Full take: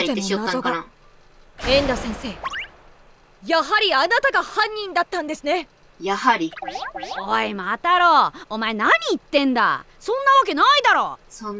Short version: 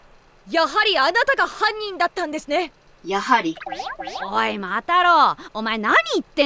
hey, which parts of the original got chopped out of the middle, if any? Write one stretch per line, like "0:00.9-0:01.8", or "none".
none